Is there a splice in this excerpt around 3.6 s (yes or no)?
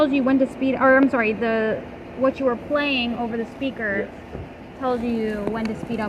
no